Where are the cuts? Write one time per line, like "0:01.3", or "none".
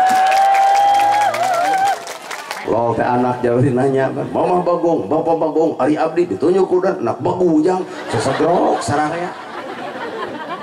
0:02.5